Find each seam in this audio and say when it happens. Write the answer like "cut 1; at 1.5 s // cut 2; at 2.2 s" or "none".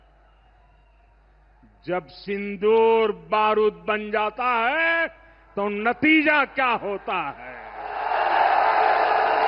none

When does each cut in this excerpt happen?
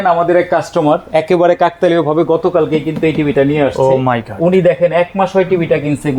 none

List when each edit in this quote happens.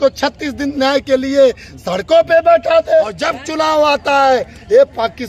cut 1; at 3.2 s

